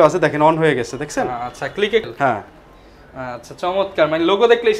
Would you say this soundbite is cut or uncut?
cut